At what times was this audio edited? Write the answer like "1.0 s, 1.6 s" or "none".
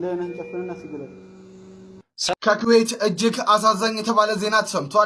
2.3 s